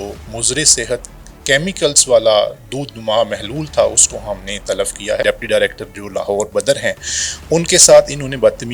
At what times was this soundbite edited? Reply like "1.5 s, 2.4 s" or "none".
5.2 s